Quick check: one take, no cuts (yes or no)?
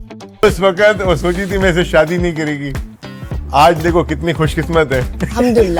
yes